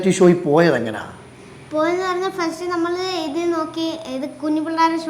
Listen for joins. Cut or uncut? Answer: uncut